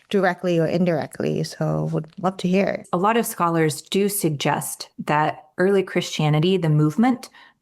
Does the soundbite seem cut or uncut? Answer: cut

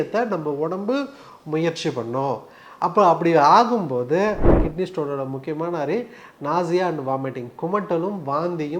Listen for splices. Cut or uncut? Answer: cut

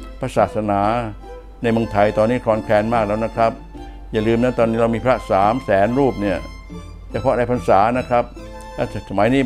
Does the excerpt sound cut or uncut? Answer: uncut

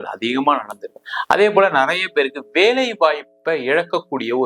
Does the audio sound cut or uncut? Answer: cut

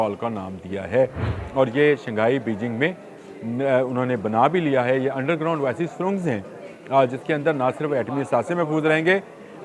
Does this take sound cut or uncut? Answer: uncut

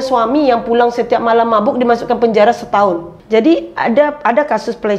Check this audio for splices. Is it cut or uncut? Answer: cut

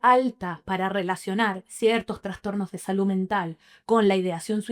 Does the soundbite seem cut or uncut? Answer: uncut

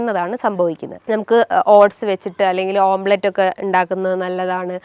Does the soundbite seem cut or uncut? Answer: cut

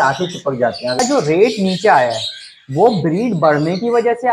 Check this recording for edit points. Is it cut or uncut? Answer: cut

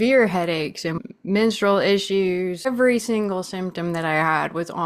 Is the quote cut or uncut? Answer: cut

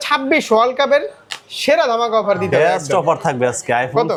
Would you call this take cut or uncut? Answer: uncut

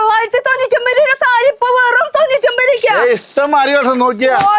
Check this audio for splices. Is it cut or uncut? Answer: uncut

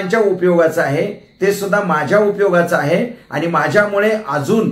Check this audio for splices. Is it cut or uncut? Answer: uncut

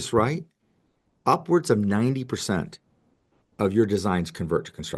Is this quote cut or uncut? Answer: uncut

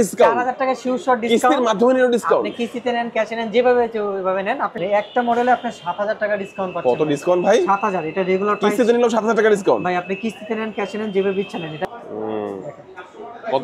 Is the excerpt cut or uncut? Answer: cut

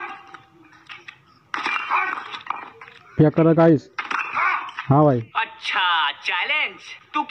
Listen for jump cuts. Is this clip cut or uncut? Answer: uncut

